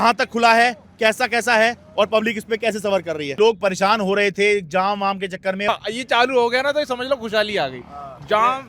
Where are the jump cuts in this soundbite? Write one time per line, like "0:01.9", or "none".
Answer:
0:03.3
0:05.7